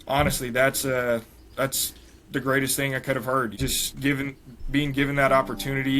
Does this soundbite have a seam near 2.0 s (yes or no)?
no